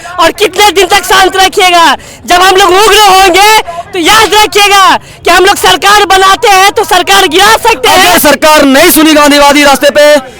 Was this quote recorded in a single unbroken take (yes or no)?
no